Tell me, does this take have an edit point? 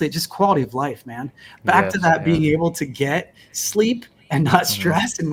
no; 0 cuts

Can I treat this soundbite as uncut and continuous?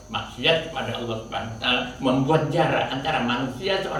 yes; 0 cuts

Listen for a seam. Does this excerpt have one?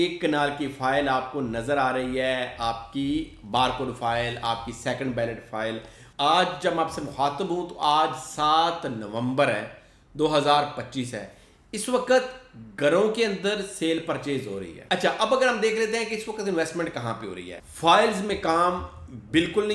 yes; 3 cuts; at 6.0 s, 14.7 s, 17.5 s

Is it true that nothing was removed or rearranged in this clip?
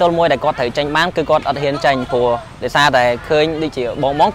yes; 0 cuts

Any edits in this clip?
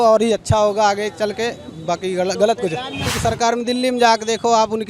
yes; 1 cut; at 3.0 s

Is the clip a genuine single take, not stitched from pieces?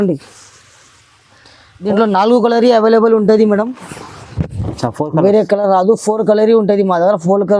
no; 1 cut; at 1.9 s

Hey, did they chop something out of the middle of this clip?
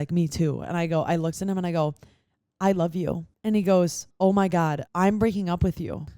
yes; 3 cuts; at 3.3 s, 4.0 s, 4.8 s

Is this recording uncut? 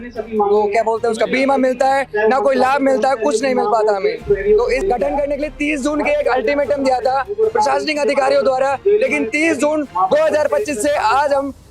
no; 1 cut; at 4.8 s

